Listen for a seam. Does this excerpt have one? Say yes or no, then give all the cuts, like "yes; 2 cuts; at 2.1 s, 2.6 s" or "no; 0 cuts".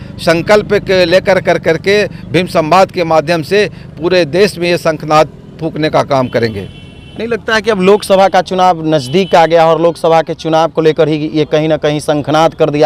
no; 0 cuts